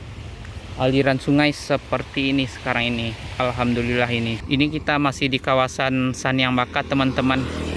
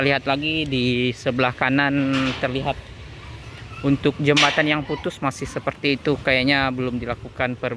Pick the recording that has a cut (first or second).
first